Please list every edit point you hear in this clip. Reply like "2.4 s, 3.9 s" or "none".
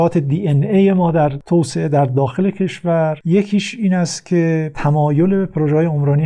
1.4 s, 3.2 s, 4.7 s